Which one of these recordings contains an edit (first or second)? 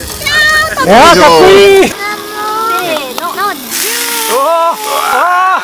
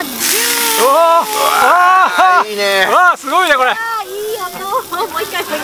first